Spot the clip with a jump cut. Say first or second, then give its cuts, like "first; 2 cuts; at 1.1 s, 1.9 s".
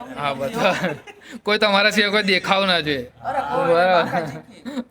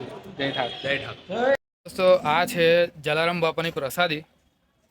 second; 1 cut; at 1.6 s